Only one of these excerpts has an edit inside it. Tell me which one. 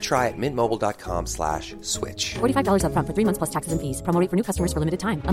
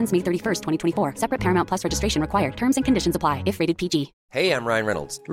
second; 1 cut; at 4.2 s

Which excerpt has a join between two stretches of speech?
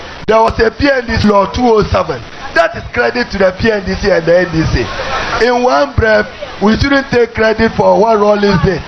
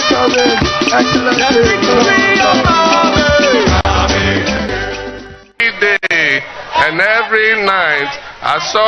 second; 1 cut; at 5.4 s

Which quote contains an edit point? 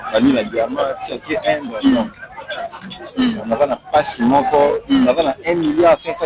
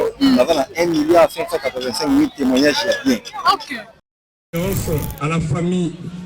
second; 1 cut; at 4.2 s

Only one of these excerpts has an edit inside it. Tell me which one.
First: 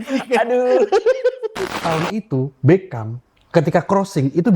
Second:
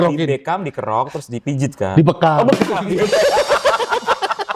first; 1 cut; at 1.8 s

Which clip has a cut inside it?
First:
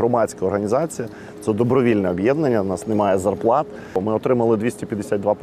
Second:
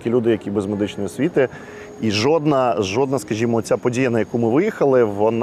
first; 1 cut; at 4.0 s

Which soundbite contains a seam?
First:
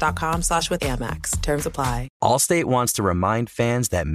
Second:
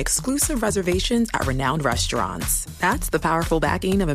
first; 1 cut; at 2.1 s

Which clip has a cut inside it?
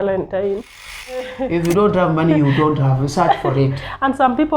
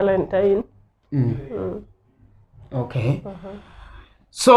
first; 1 cut; at 1.3 s

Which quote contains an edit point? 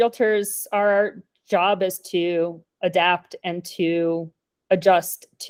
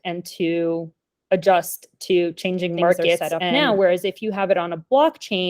second; 1 cut; at 3.3 s

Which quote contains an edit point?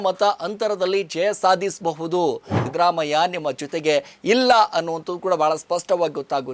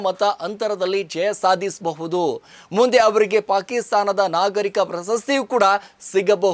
first; 1 cut; at 2.6 s

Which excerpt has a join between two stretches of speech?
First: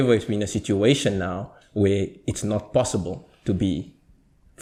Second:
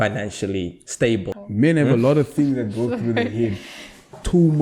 second; 1 cut; at 1.4 s

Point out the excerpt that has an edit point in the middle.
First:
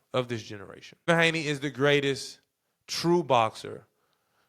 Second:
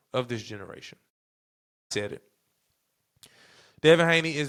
first; 1 cut; at 1.1 s

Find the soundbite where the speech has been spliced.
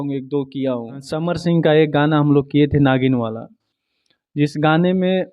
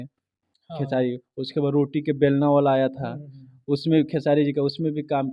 first; 1 cut; at 1.3 s

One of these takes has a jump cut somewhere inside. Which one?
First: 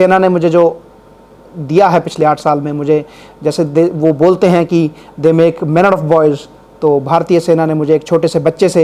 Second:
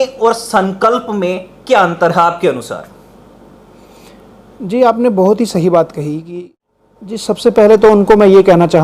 second; 1 cut; at 7.0 s

